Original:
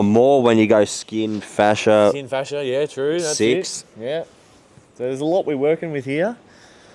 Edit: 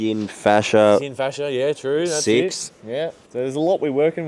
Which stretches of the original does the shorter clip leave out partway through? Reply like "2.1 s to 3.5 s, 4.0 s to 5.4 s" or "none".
4.4 s to 4.9 s